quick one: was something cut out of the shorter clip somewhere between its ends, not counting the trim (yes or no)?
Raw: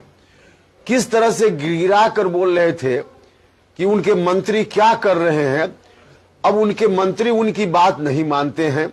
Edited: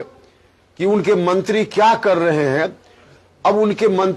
no